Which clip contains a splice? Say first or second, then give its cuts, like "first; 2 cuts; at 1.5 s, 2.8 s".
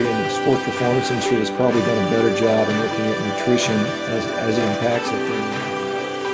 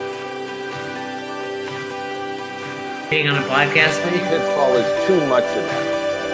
second; 1 cut; at 3.1 s